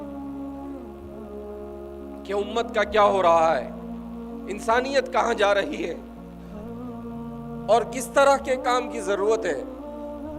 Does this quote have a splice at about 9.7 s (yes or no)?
yes